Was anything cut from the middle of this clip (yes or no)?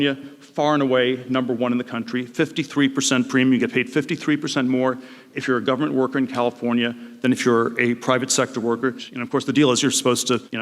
no